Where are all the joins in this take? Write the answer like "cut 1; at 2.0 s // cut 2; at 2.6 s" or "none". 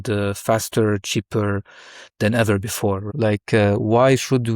cut 1; at 3.1 s